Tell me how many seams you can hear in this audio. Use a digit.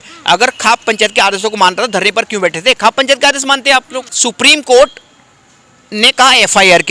1